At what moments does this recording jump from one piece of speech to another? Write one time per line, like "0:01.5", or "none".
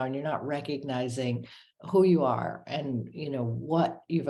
none